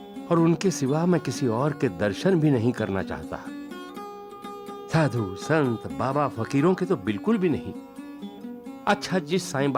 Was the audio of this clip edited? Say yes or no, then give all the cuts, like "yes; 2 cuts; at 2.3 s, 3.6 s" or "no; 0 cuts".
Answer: no; 0 cuts